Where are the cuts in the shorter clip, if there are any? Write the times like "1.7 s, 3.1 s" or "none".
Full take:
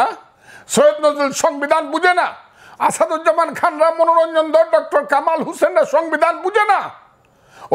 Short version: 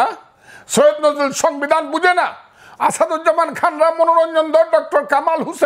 none

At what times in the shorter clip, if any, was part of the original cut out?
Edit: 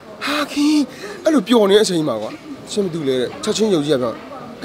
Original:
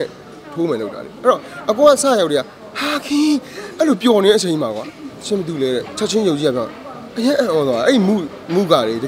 none

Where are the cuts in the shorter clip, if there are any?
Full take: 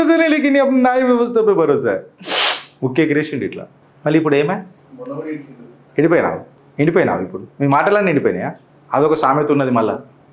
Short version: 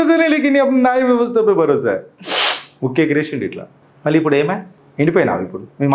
4.8 s

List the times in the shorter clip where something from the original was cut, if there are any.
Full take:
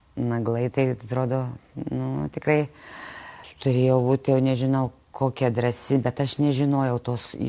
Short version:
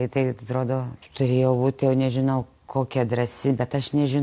1.0 s

